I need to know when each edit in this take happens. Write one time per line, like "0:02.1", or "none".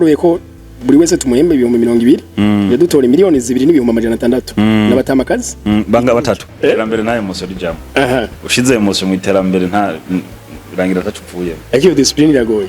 0:06.5